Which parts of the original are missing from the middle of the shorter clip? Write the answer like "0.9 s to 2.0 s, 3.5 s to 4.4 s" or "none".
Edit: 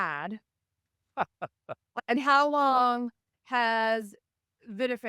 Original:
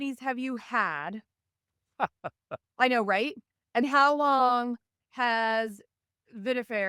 2.6 s to 3.5 s